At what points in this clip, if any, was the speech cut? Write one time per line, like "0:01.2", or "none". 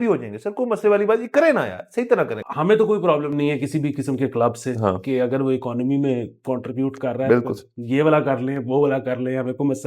0:02.4
0:07.7